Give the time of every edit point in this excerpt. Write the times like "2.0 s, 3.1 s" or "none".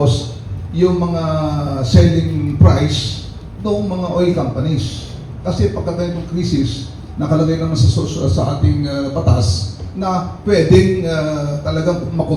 none

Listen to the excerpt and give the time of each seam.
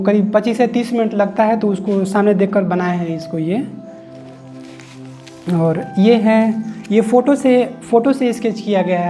3.8 s, 5.4 s

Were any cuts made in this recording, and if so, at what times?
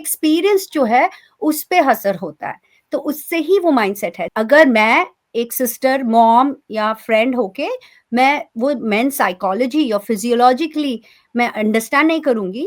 4.2 s

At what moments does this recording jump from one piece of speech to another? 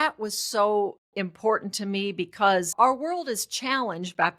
2.7 s

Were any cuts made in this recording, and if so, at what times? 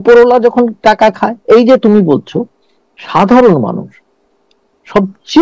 none

